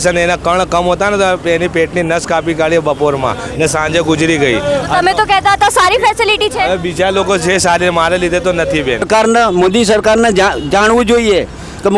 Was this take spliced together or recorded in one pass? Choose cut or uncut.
cut